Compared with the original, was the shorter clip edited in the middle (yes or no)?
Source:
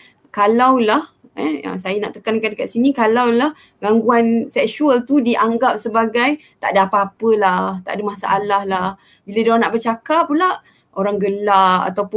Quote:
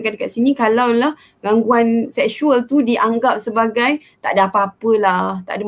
no